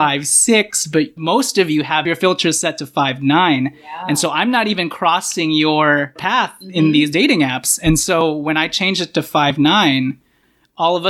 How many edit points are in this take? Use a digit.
1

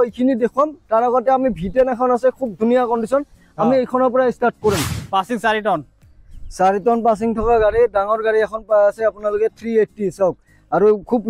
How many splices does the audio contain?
1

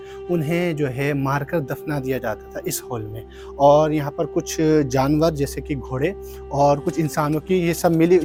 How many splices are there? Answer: 0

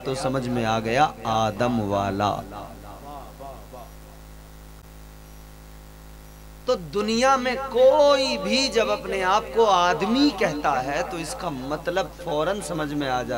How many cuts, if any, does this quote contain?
0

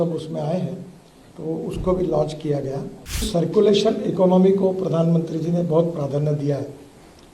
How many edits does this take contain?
1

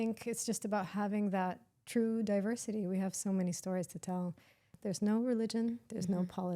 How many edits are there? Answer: 1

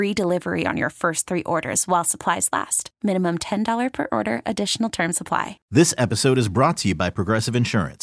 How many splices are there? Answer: 1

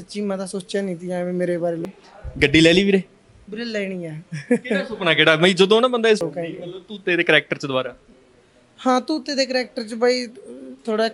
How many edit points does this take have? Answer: 2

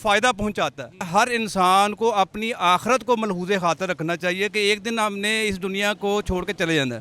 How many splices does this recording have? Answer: 1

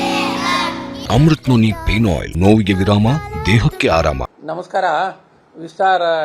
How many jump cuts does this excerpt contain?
3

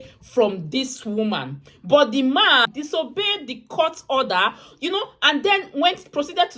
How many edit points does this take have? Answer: 1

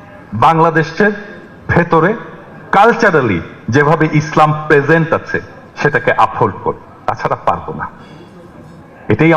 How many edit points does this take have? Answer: 0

